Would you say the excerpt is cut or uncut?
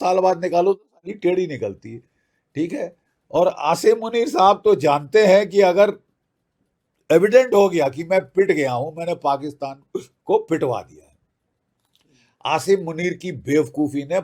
uncut